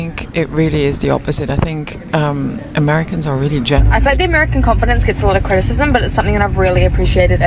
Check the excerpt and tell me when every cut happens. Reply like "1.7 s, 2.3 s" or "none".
3.8 s